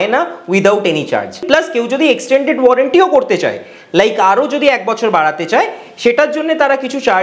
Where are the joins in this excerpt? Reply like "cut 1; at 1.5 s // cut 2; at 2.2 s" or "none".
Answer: cut 1; at 1.4 s